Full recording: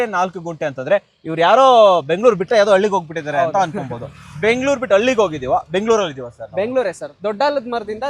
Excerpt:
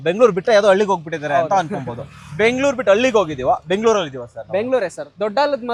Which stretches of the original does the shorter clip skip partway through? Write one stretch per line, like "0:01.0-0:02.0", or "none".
none